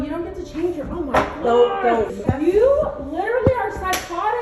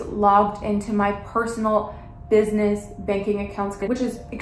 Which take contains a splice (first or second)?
first